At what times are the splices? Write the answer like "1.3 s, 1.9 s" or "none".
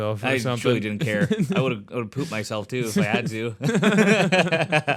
none